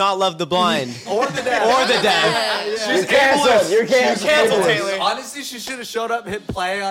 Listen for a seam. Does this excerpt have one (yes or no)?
no